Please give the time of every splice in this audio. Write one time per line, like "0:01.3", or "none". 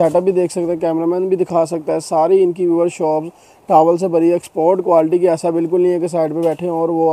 none

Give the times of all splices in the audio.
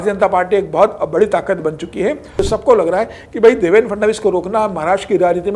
0:02.4

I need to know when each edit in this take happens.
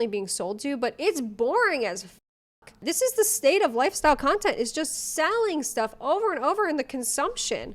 0:02.8

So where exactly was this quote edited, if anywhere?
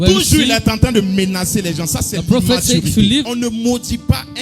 0:03.3

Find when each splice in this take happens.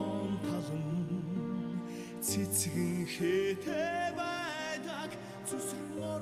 none

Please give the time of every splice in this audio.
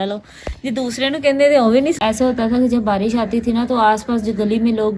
0:02.0

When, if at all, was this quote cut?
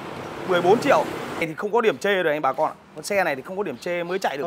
0:01.5

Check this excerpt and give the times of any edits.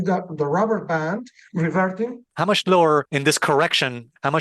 0:02.3

